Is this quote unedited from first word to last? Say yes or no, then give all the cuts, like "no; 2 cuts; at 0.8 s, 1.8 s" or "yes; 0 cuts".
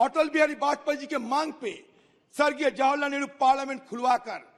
yes; 0 cuts